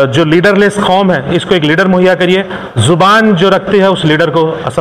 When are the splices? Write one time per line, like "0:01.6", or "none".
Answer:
none